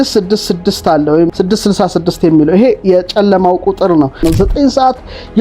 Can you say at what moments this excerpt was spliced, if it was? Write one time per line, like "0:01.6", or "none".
0:01.3
0:04.2

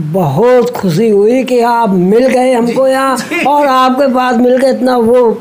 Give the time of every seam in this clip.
none

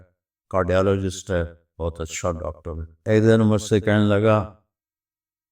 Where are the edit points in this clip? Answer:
0:02.9

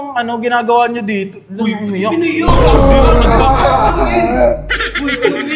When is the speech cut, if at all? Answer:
none

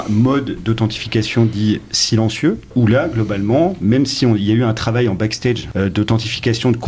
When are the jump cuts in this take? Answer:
0:02.7
0:05.7

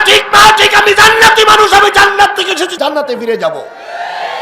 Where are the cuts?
0:02.7

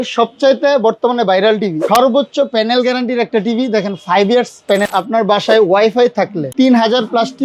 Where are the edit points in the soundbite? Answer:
0:01.8
0:04.9
0:06.4

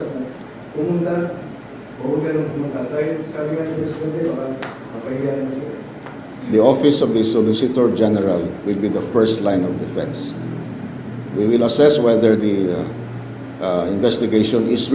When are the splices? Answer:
none

